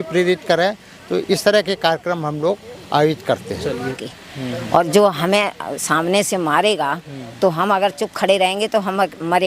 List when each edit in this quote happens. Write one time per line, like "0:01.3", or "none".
0:03.9